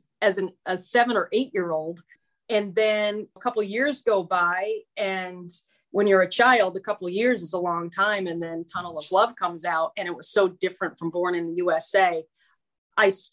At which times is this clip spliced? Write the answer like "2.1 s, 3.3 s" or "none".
2.1 s, 3.4 s